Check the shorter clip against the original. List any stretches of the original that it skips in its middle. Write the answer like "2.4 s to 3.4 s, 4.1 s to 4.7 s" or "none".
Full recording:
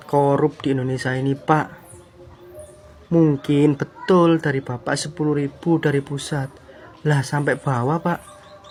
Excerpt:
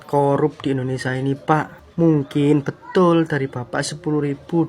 1.8 s to 2.9 s